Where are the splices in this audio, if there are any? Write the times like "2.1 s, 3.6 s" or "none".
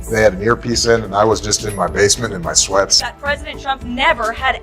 3.0 s